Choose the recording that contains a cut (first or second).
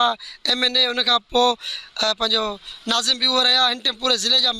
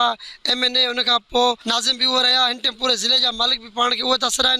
second